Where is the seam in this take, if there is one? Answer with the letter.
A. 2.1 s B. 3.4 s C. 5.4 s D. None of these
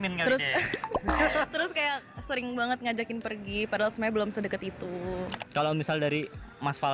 C